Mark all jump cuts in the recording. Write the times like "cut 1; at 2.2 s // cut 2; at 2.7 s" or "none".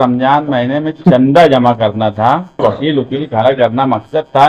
cut 1; at 2.6 s